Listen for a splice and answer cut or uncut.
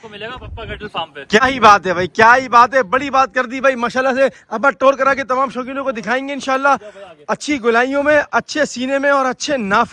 uncut